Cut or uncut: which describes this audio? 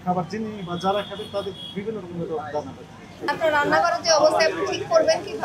cut